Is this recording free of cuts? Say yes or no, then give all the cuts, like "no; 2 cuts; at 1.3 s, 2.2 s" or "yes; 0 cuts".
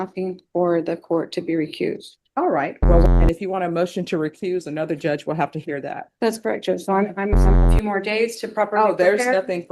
no; 2 cuts; at 3.0 s, 7.7 s